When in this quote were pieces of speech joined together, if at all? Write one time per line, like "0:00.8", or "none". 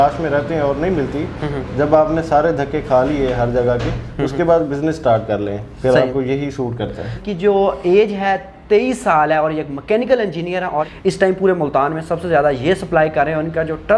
0:07.1
0:10.9